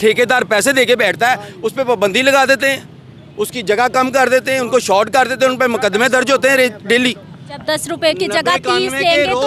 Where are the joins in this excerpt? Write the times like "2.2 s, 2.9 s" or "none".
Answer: none